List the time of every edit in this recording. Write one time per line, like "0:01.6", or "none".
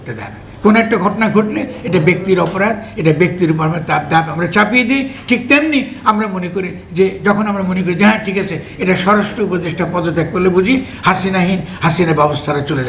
none